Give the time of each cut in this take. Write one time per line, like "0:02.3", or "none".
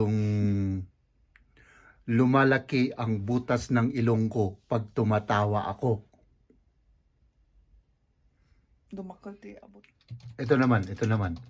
0:09.6